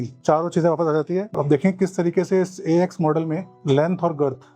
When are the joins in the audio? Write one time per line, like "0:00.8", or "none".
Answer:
0:01.3